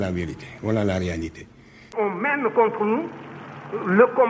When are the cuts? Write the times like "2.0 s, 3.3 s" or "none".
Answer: 1.9 s